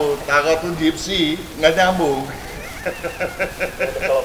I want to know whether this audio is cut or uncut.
cut